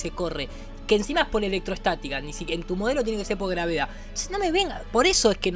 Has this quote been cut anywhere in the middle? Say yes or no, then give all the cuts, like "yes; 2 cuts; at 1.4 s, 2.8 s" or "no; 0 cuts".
no; 0 cuts